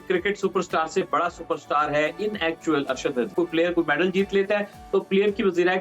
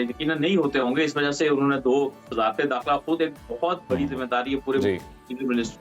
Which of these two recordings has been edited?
first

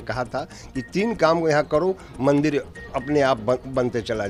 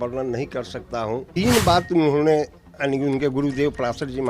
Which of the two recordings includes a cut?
second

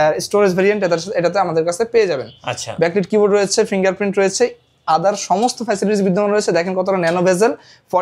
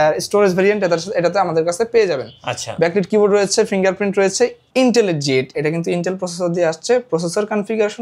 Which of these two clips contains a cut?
second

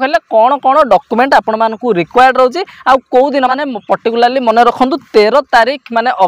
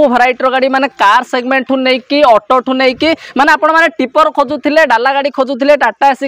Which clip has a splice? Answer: first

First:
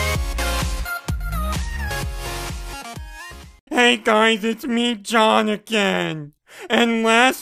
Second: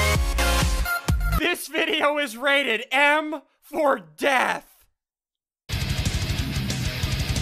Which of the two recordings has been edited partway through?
second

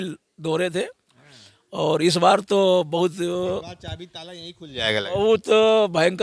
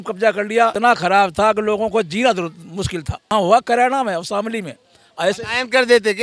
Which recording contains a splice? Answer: second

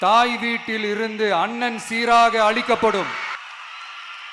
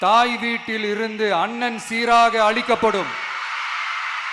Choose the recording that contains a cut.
first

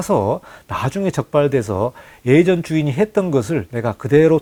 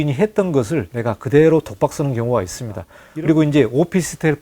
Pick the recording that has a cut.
second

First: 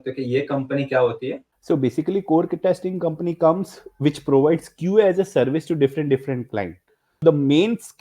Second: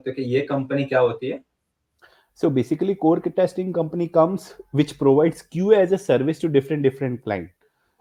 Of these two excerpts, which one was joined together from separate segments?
first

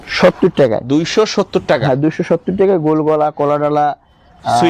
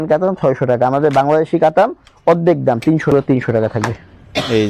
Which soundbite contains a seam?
second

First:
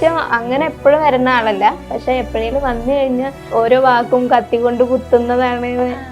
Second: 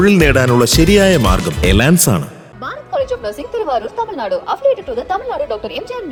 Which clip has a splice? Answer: first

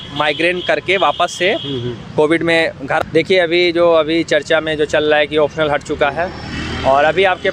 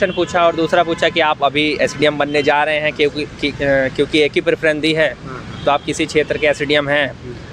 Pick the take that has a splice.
first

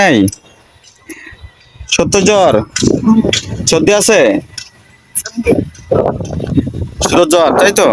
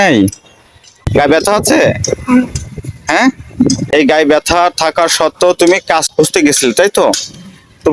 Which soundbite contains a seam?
second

